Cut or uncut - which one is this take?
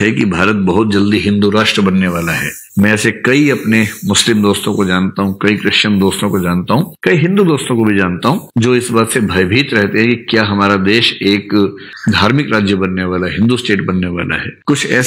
uncut